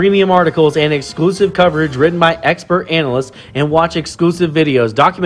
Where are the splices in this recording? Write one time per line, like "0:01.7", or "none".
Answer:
none